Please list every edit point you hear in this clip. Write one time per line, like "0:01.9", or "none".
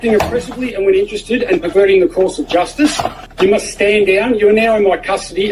0:03.2